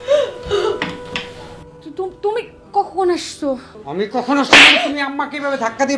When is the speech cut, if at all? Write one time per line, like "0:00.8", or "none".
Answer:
0:03.8